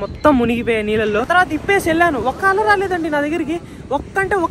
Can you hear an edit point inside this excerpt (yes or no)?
yes